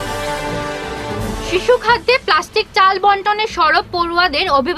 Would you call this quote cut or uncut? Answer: cut